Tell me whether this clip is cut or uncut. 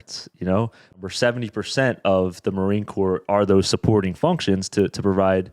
cut